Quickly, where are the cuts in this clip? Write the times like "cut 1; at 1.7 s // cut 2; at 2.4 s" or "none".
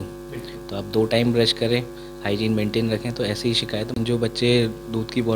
cut 1; at 3.9 s